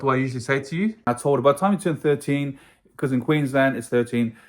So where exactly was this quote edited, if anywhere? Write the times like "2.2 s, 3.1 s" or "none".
1.0 s